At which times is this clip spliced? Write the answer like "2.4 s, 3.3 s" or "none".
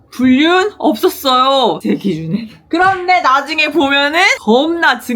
1.8 s, 4.4 s